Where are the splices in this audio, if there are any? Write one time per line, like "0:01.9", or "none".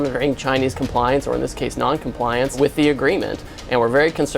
0:02.6